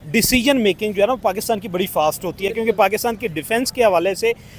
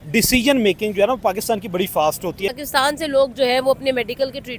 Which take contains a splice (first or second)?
second